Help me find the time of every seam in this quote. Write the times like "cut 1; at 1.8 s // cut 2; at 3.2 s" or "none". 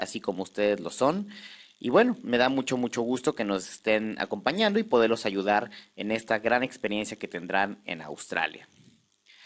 cut 1; at 6.8 s